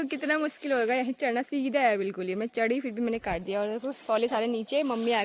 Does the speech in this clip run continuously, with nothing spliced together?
yes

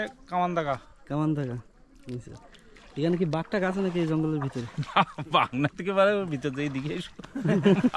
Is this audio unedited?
yes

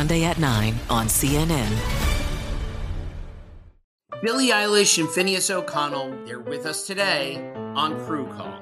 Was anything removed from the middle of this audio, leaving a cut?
yes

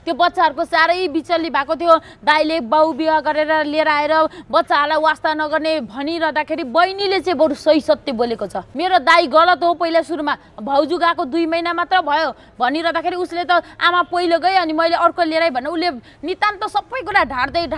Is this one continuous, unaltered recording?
no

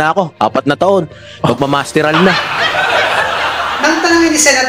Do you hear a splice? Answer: yes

